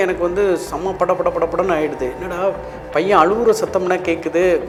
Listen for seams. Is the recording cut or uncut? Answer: uncut